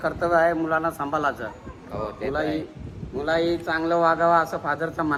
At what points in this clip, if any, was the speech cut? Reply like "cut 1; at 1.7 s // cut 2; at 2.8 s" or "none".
none